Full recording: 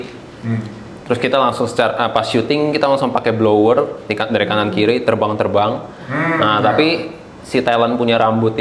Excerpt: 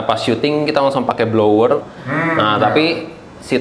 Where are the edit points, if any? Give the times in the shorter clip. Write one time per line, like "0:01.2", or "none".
0:01.9